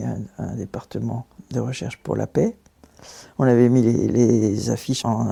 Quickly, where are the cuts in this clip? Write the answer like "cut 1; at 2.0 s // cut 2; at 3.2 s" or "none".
none